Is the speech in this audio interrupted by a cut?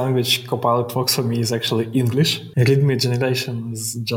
yes; 1 cut; at 2.4 s

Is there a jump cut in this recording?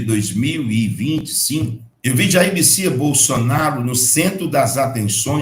yes; 1 cut; at 1.8 s

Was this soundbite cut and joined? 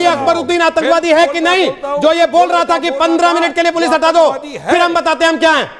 no; 0 cuts

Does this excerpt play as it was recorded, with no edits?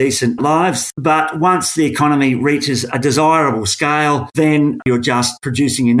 no; 2 cuts; at 0.9 s, 4.9 s

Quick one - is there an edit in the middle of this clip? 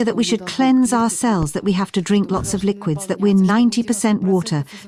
no; 0 cuts

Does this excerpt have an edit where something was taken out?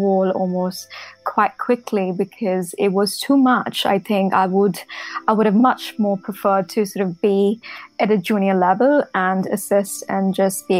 yes; 1 cut; at 1.2 s

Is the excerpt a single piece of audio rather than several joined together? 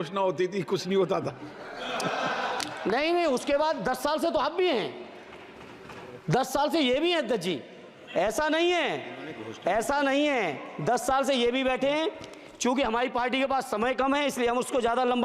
yes; 0 cuts

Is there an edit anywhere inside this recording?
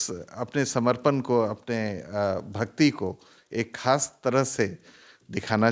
no; 0 cuts

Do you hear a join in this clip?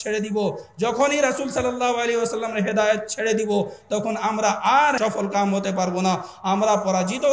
yes; 1 cut; at 5.0 s

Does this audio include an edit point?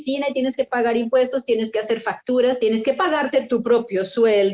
yes; 1 cut; at 2.6 s

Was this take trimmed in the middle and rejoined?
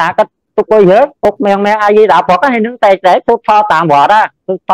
yes; 1 cut; at 1.2 s

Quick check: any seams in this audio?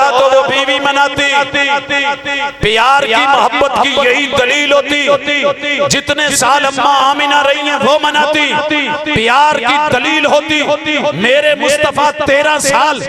no; 0 cuts

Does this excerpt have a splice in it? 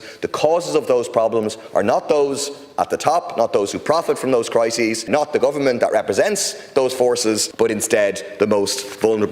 yes; 2 cuts; at 5.1 s, 7.5 s

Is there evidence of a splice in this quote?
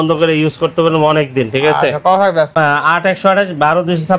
yes; 1 cut; at 2.5 s

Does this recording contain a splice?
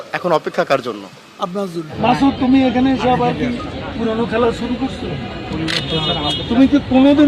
yes; 1 cut; at 1.9 s

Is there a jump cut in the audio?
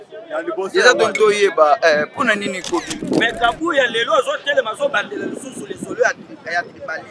yes; 1 cut; at 3.0 s

